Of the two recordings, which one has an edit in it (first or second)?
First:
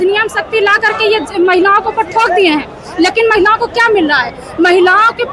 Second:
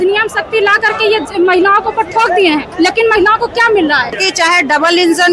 second